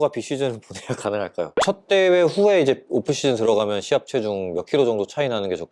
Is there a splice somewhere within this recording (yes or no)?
yes